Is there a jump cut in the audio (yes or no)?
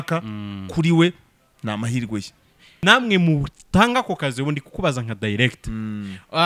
yes